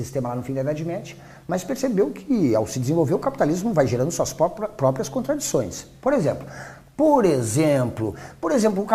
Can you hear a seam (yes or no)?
yes